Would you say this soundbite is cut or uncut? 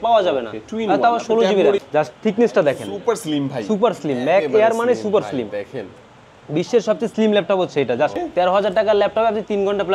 cut